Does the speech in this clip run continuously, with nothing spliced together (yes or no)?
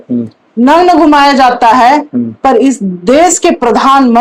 yes